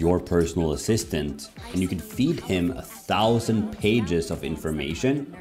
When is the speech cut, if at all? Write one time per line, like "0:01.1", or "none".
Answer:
none